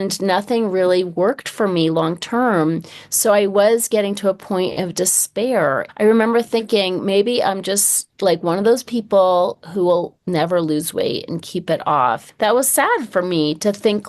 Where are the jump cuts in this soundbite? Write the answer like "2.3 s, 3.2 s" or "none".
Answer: 5.9 s, 12.3 s